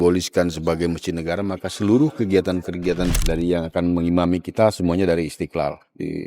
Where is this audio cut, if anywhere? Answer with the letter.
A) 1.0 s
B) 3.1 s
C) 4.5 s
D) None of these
B